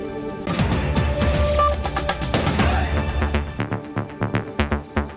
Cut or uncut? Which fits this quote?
cut